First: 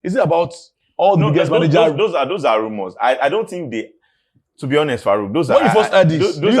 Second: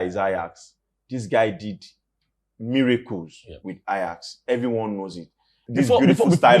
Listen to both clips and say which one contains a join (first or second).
second